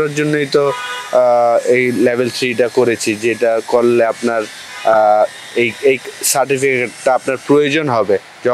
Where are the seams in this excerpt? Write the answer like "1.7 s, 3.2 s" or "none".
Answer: none